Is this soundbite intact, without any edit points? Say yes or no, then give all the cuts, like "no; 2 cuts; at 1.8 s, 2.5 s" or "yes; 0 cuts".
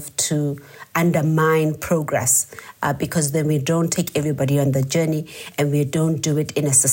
yes; 0 cuts